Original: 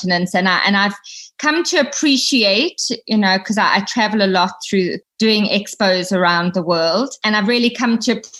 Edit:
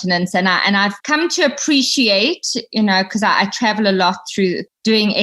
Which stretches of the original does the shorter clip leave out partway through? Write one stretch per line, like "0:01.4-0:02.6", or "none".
0:01.0-0:01.4